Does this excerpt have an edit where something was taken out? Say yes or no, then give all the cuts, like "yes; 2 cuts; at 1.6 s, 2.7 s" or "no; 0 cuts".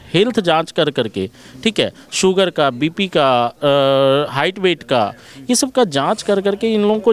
no; 0 cuts